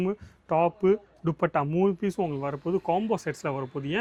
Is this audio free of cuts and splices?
yes; 0 cuts

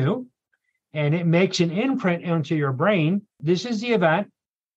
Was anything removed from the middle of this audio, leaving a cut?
yes; 1 cut; at 3.4 s

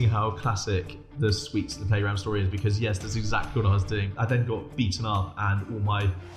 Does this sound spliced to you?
yes; 1 cut; at 3.8 s

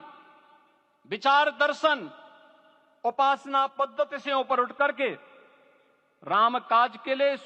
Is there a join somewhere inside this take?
no; 0 cuts

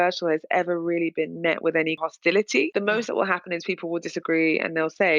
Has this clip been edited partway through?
yes; 1 cut; at 2.5 s

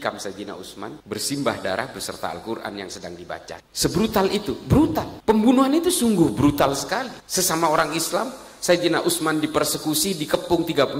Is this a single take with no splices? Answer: yes; 0 cuts

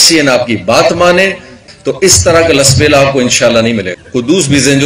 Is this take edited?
yes; 2 cuts; at 1.6 s, 4.0 s

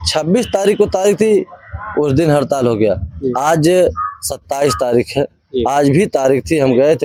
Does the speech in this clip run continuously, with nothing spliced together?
yes; 0 cuts

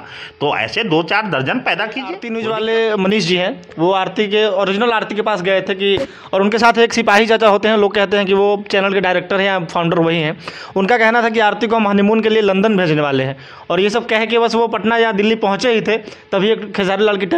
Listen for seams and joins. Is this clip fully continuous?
no; 1 cut; at 2.2 s

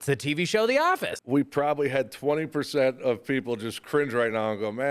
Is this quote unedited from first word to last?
no; 1 cut; at 1.1 s

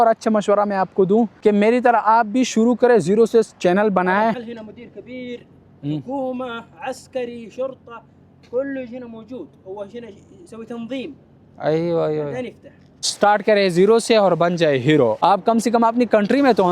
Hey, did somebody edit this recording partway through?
yes; 2 cuts; at 4.4 s, 13.0 s

